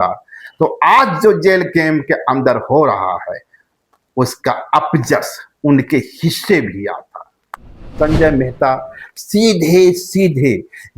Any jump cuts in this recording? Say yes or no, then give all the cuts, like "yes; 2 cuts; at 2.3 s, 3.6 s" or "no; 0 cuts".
yes; 1 cut; at 7.9 s